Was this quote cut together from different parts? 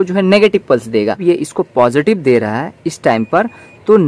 yes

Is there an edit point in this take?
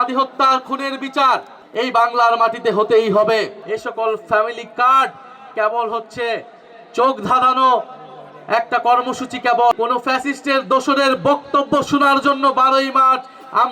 yes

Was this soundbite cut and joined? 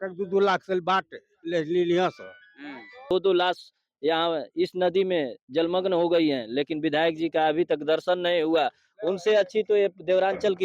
yes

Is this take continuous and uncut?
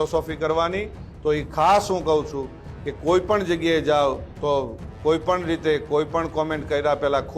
yes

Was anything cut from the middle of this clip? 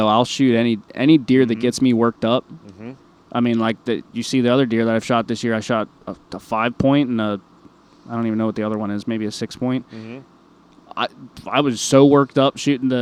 no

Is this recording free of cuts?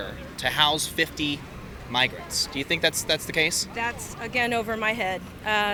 yes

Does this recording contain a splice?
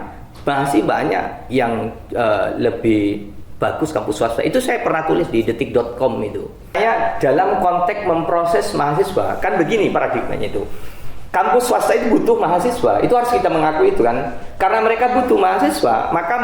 yes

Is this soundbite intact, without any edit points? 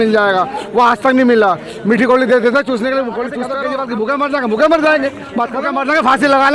no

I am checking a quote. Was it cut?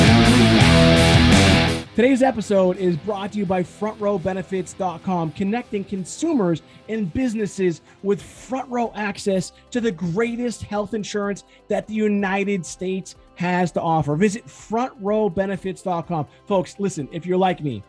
yes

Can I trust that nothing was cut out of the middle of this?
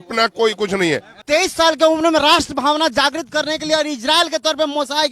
no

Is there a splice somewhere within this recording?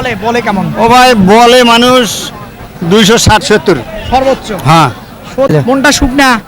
yes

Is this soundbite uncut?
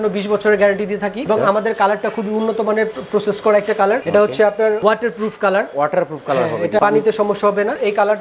yes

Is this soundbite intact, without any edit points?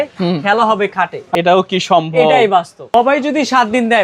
no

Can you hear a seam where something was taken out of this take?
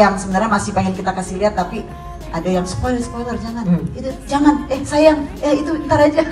no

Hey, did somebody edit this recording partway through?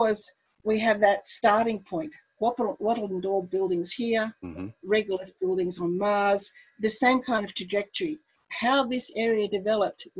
no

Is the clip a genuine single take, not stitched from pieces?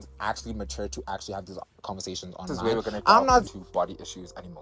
no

